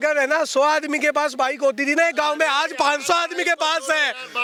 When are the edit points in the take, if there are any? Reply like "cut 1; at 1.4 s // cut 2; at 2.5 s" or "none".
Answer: none